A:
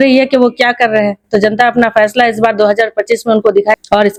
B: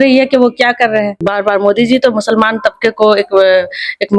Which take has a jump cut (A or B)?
B